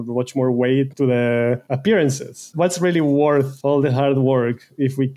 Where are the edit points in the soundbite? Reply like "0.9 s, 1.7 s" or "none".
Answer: 0.9 s, 1.7 s, 2.5 s, 3.5 s